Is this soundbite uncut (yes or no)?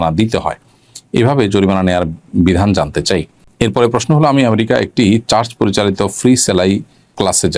no